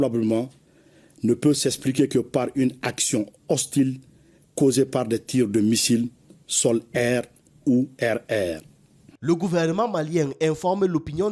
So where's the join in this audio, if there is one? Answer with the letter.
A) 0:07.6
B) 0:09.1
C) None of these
B